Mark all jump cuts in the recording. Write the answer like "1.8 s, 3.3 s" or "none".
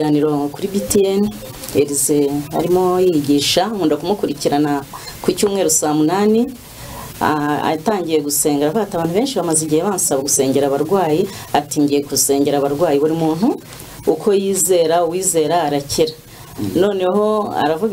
none